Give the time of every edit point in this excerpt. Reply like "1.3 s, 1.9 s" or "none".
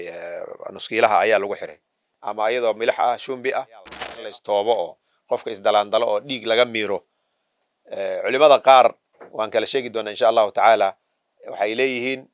4.0 s